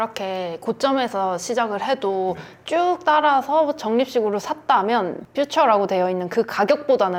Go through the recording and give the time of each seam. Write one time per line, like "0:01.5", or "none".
none